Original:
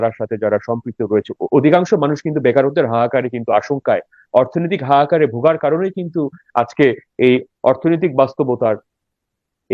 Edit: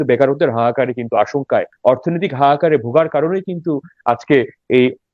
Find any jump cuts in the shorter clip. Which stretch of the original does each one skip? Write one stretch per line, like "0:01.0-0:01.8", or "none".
0:04.1-0:04.2